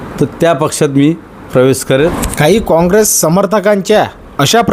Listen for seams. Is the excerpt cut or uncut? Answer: cut